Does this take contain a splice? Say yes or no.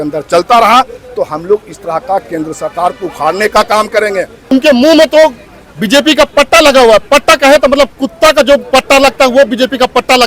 yes